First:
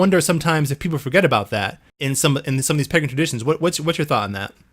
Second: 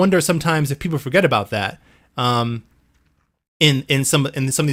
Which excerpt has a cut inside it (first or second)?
first